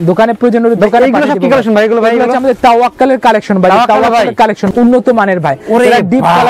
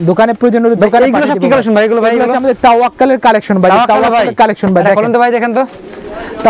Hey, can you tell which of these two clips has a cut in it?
first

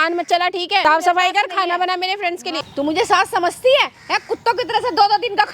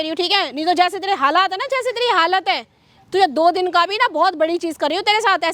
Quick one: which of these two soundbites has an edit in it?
first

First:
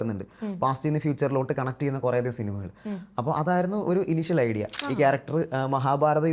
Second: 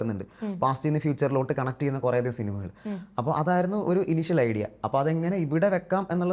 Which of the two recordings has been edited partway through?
first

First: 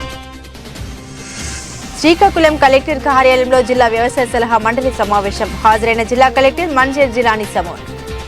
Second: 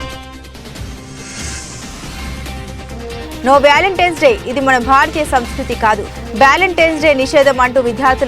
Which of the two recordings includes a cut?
first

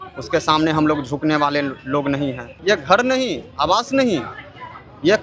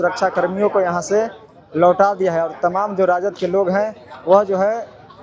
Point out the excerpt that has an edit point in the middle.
first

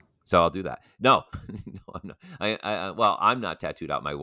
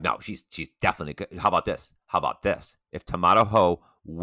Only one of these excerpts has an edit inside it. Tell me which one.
first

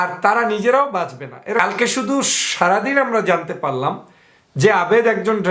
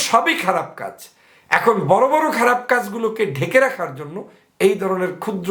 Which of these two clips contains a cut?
first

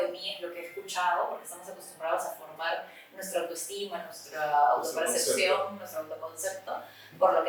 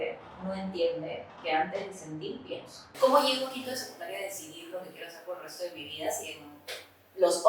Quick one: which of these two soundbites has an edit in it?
second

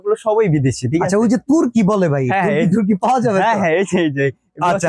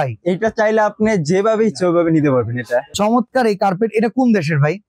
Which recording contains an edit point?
second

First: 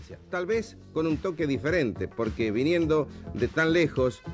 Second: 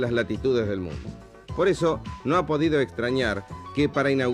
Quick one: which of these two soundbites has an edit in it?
first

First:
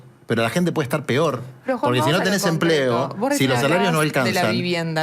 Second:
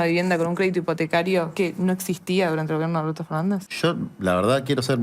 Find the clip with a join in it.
second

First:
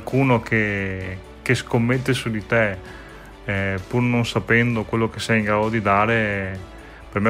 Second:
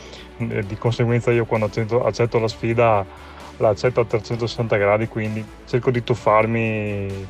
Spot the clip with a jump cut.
second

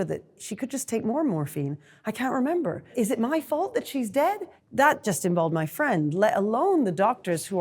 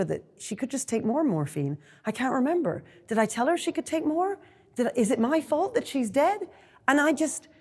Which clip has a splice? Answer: first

